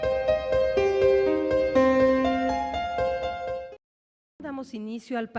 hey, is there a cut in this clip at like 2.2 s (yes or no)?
yes